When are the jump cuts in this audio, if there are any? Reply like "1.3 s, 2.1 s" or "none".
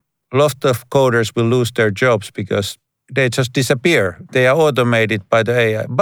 3.1 s, 4.2 s